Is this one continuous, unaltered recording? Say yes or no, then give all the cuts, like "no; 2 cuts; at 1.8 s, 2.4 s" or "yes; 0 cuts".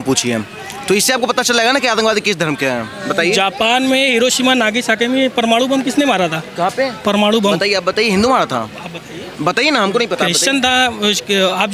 yes; 0 cuts